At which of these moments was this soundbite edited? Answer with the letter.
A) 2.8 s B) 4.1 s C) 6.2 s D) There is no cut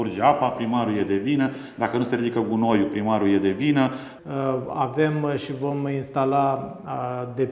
B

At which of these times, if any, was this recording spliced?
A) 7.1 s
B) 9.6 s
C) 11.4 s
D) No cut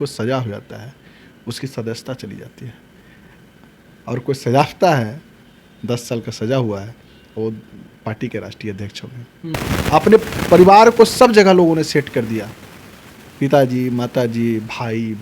B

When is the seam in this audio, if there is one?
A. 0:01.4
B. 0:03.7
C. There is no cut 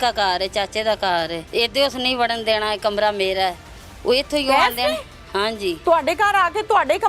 A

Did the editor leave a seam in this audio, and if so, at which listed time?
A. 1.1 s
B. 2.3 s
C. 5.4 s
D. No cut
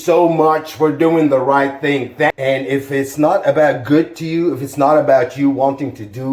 B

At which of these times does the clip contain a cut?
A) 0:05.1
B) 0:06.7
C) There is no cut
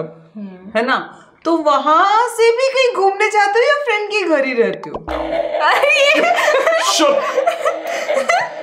A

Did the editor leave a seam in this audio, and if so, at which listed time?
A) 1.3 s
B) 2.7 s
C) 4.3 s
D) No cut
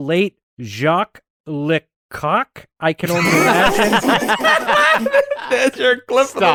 D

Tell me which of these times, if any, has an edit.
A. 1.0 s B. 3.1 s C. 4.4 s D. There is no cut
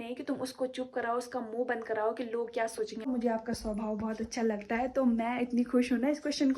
B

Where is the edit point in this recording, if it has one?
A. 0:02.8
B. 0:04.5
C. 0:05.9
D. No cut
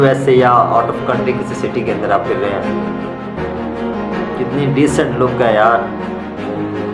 D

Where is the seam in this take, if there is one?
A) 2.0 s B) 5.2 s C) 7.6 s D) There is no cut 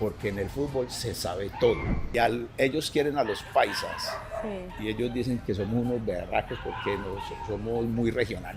A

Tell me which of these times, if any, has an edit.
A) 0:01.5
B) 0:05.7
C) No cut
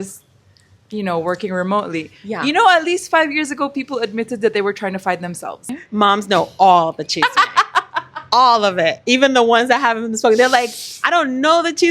B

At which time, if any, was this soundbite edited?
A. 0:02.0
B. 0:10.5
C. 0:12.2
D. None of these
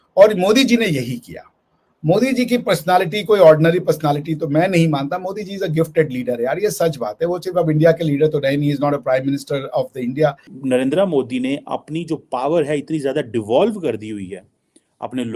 B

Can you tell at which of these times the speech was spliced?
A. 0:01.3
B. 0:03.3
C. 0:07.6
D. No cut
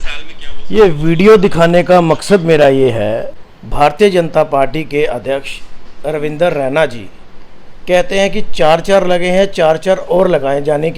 B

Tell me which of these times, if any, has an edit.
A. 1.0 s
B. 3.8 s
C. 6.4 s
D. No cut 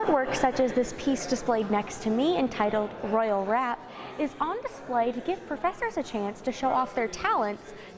D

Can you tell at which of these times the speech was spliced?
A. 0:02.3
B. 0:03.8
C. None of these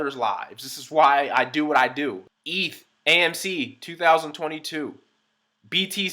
A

